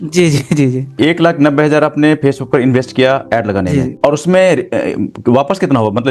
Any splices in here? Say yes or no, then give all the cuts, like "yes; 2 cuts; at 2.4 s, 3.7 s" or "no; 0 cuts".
yes; 1 cut; at 3.9 s